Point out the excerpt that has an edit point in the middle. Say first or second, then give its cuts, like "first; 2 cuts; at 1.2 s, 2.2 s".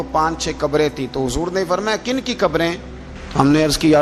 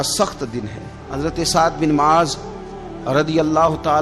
second; 1 cut; at 1.0 s